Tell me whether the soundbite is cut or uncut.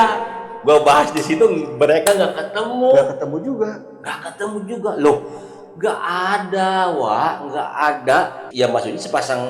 cut